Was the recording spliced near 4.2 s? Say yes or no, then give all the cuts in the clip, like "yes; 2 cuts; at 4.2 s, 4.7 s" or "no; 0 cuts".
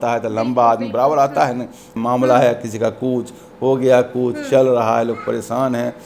no; 1 cut; at 1.9 s